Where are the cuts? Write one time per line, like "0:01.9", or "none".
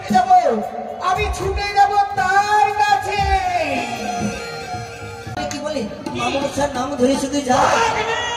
0:05.4